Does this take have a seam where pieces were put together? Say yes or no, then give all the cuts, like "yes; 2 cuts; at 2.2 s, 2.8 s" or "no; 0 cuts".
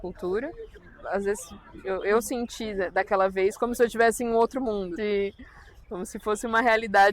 yes; 2 cuts; at 0.9 s, 4.9 s